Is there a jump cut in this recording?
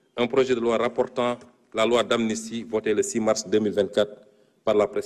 no; 0 cuts

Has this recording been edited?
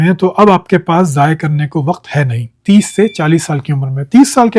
yes; 1 cut; at 2.6 s

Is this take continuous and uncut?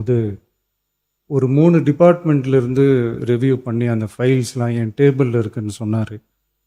yes; 0 cuts

